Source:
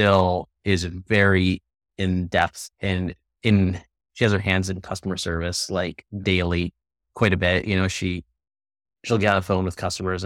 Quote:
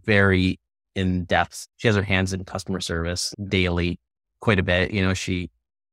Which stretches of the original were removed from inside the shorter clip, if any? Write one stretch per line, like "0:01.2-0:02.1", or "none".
0:02.7-0:04.0
0:05.6-0:06.0